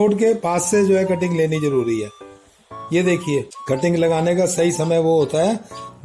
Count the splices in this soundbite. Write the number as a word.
one